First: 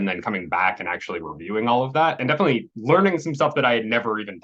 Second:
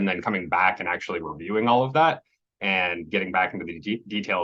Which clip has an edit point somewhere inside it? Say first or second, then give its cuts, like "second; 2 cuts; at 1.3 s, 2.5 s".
first; 1 cut; at 2.2 s